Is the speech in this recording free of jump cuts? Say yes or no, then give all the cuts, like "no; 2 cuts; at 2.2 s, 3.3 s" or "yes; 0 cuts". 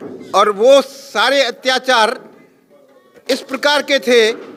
yes; 0 cuts